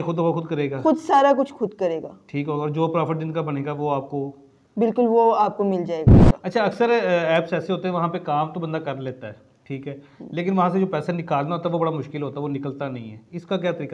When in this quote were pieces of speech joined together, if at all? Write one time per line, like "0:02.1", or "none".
0:06.2